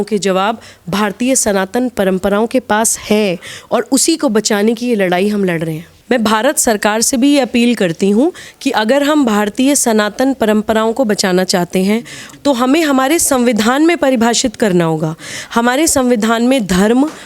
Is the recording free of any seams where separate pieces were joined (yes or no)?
no